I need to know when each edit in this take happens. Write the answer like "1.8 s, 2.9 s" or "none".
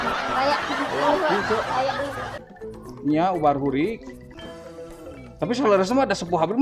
2.3 s